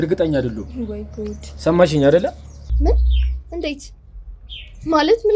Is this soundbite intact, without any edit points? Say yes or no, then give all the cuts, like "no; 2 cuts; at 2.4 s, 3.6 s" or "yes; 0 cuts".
no; 1 cut; at 2.6 s